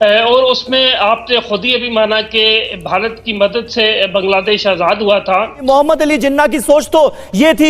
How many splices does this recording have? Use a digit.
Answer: 1